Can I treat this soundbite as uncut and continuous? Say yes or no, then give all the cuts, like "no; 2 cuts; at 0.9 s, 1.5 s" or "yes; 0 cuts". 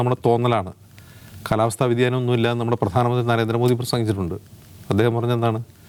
yes; 0 cuts